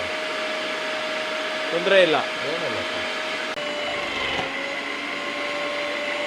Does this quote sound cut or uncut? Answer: cut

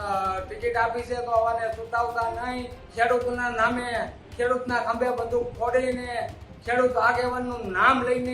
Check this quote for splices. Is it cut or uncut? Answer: cut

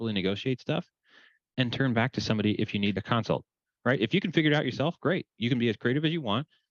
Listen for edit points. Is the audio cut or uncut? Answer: uncut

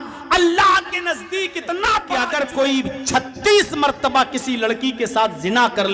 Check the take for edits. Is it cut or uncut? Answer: cut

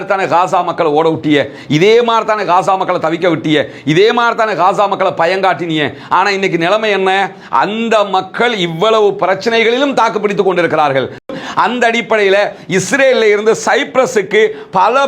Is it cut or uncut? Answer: cut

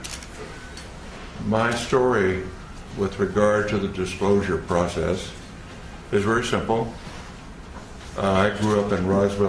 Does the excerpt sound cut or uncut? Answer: uncut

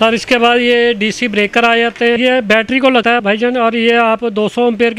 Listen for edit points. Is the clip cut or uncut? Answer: cut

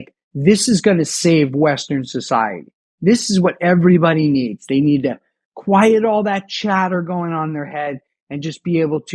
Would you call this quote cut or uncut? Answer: uncut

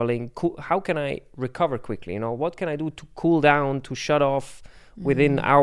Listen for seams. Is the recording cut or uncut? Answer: uncut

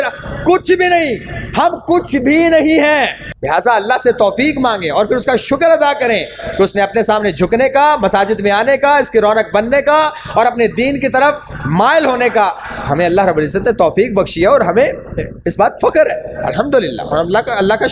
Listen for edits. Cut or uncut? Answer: cut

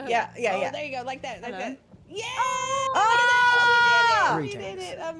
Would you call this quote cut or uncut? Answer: uncut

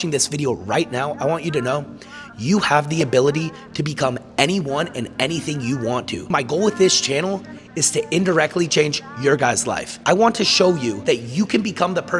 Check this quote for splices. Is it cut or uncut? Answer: cut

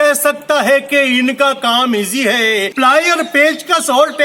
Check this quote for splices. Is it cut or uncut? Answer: cut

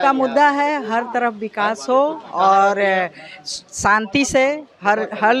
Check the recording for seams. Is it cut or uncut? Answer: uncut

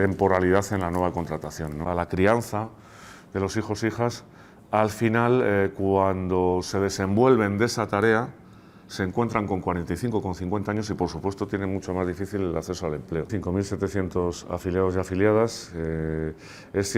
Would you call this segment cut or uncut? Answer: cut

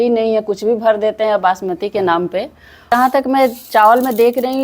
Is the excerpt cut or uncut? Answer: cut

